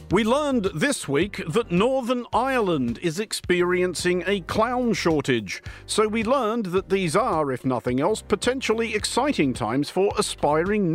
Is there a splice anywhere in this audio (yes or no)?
yes